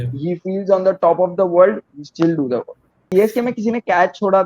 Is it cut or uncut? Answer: cut